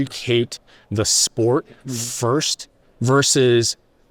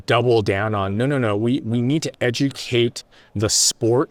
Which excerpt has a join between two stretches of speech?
first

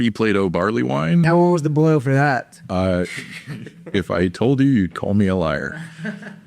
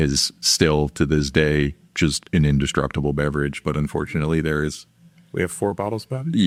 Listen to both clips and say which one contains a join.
first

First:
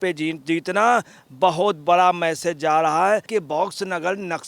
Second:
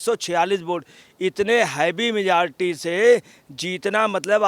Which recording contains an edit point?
first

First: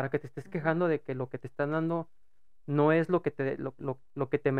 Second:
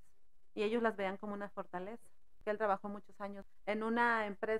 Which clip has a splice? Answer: second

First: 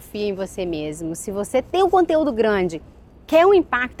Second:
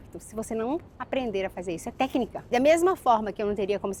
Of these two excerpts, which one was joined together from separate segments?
second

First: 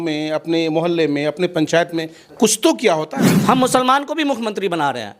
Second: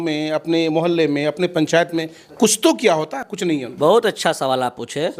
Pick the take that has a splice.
first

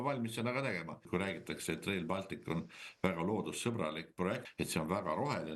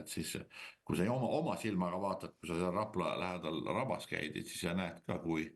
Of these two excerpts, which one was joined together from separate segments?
first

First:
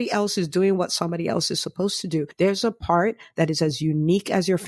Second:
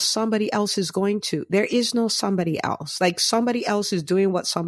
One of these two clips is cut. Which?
first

